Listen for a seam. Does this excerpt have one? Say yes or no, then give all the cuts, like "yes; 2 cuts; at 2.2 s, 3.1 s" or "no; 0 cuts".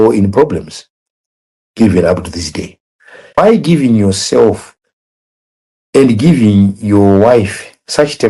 yes; 1 cut; at 3.4 s